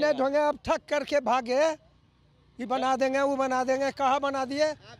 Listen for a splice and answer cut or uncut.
uncut